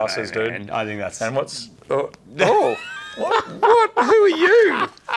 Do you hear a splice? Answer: no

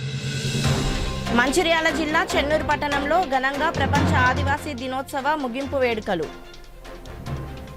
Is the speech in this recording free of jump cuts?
yes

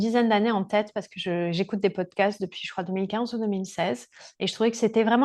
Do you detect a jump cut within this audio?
no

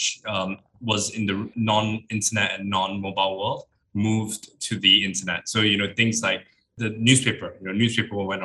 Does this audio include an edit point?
yes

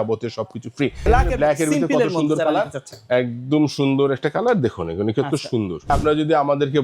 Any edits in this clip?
yes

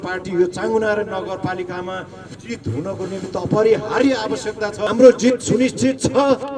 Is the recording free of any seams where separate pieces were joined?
no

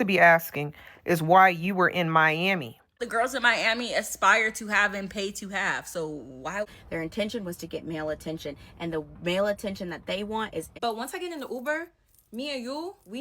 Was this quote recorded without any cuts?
no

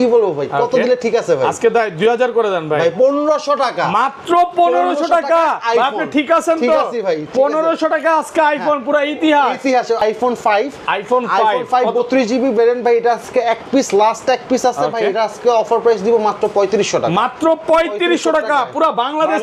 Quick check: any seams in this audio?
yes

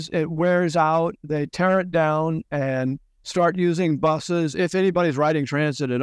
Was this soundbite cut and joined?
no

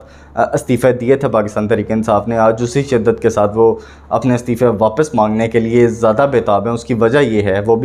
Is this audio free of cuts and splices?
yes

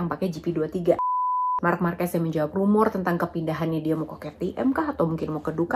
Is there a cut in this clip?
yes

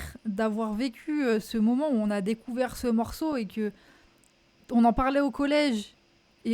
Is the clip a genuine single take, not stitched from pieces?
yes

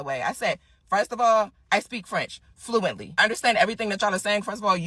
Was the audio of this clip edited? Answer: yes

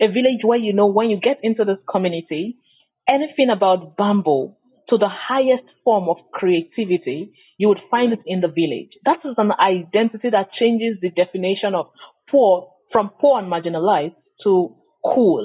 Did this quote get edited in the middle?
no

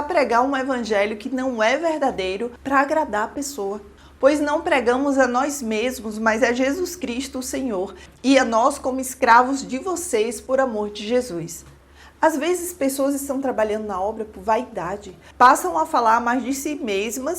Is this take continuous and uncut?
yes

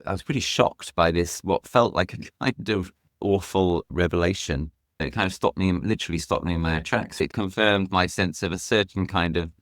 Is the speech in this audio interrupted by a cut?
yes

